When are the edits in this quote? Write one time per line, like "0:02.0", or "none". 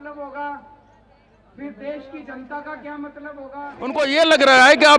0:04.0